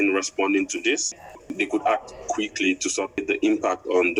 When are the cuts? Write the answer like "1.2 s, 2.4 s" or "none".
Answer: 1.2 s, 3.2 s

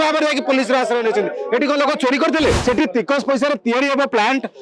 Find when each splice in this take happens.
2.6 s

